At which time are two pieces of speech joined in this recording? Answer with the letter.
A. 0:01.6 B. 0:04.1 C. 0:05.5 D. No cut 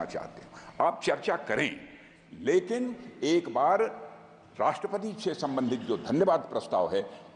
D